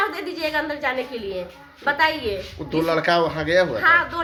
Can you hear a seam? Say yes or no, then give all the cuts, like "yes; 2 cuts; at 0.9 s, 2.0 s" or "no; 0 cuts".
no; 0 cuts